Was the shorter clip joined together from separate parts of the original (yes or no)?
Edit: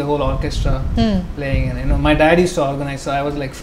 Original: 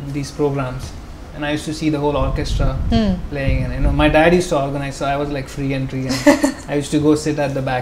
no